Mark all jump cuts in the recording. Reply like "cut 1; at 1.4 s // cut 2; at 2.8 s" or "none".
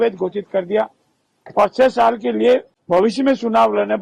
cut 1; at 2.7 s